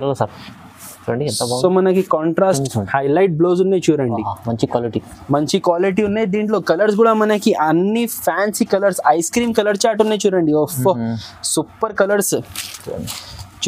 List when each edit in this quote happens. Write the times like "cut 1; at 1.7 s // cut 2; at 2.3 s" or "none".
cut 1; at 2.6 s